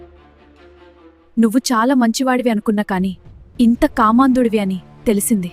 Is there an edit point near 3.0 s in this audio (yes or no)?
no